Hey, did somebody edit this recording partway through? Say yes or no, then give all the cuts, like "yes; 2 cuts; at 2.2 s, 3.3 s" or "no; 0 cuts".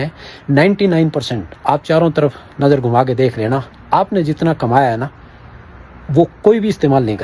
no; 0 cuts